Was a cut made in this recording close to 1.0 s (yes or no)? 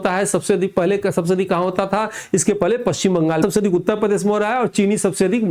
no